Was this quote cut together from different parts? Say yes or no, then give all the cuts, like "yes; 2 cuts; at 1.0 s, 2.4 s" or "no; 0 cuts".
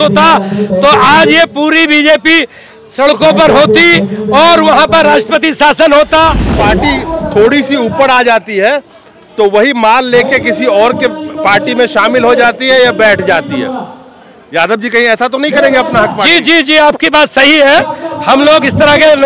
yes; 1 cut; at 6.6 s